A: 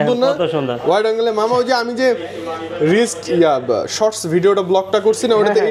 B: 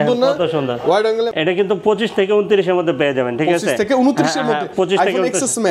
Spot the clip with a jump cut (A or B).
B